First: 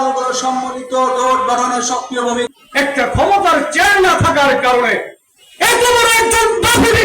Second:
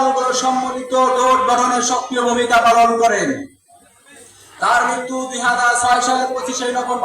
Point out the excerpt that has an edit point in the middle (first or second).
first